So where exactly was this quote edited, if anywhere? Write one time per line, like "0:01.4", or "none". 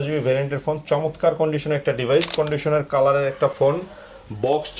0:02.3